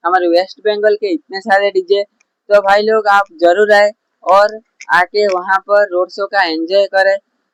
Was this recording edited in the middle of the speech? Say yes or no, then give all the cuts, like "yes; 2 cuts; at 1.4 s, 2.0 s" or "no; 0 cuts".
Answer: no; 0 cuts